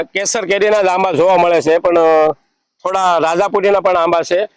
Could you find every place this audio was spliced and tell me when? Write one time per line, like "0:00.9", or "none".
none